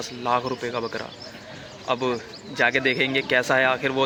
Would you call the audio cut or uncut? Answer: uncut